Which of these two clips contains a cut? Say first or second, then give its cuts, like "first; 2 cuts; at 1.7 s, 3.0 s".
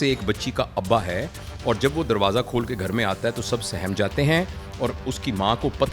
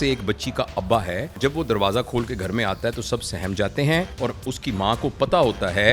second; 2 cuts; at 1.4 s, 4.1 s